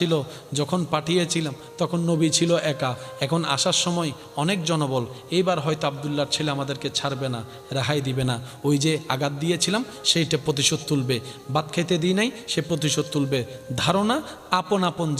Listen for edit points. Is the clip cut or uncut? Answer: uncut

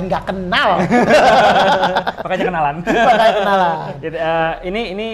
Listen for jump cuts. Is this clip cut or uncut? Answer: cut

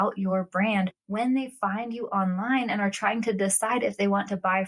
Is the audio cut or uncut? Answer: uncut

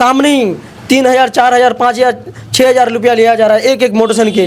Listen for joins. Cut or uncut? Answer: uncut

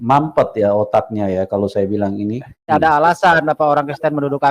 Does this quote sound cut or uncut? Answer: cut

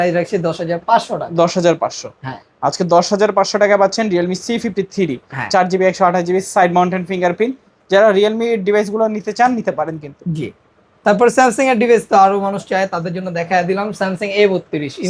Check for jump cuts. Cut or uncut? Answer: uncut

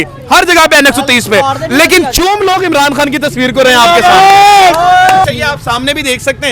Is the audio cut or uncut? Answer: cut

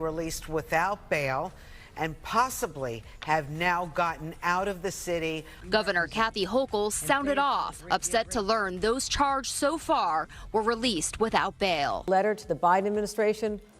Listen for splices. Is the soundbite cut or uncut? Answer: cut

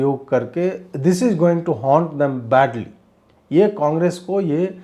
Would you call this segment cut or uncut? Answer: uncut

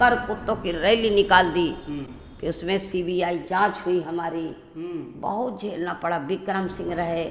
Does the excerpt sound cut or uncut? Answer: uncut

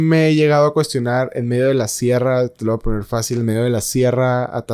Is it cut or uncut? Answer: uncut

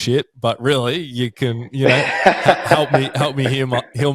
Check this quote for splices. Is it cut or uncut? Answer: uncut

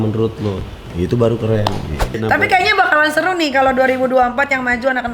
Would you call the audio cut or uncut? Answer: cut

